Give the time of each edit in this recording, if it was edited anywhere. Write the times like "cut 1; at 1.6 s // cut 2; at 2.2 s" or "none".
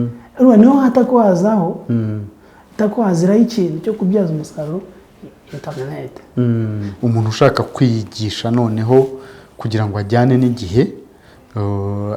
cut 1; at 6.9 s